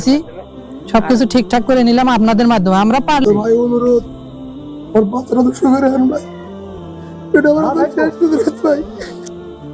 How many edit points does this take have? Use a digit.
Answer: 1